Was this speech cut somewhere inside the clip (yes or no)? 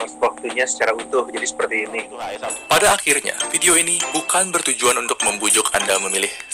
yes